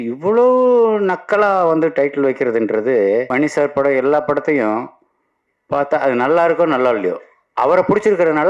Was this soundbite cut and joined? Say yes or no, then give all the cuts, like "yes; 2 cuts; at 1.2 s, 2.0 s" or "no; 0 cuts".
yes; 1 cut; at 3.3 s